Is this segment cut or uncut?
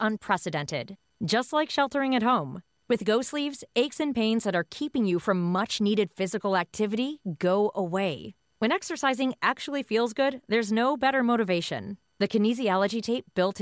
uncut